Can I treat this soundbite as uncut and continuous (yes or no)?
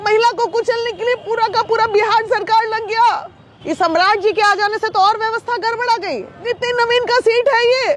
no